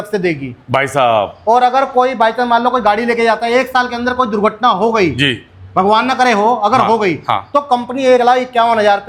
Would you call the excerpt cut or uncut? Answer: uncut